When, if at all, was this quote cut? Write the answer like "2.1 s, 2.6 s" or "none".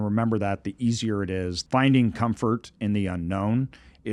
1.6 s